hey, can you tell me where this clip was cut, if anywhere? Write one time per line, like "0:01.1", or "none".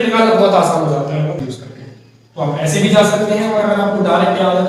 0:01.3